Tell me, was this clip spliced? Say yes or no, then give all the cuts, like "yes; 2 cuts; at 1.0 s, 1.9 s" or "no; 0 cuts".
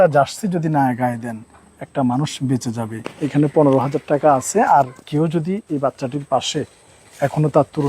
yes; 1 cut; at 3.0 s